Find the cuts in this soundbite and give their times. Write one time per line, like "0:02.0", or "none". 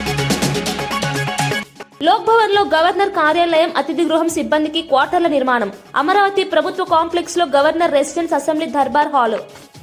none